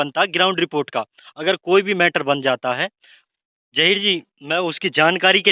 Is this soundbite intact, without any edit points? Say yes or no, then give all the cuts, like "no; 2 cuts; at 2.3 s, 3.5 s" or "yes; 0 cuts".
no; 1 cut; at 3.4 s